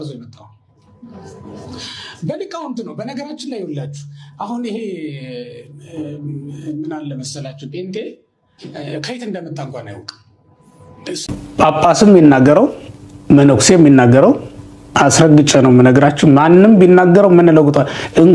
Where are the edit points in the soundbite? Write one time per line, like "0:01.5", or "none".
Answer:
0:11.2